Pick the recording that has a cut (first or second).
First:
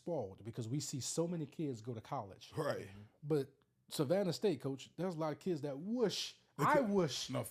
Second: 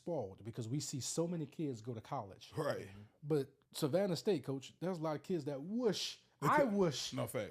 second